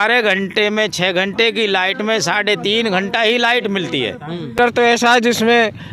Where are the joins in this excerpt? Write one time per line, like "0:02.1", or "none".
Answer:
0:04.6